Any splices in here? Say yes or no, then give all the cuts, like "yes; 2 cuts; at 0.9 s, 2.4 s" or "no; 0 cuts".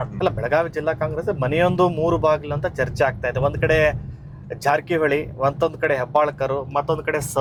no; 0 cuts